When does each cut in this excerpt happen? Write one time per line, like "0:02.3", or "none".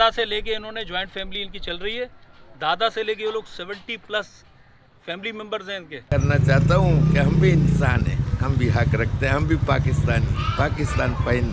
0:06.0